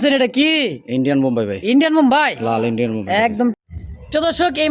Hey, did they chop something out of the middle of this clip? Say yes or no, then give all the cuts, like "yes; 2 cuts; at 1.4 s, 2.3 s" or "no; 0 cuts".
yes; 1 cut; at 3.5 s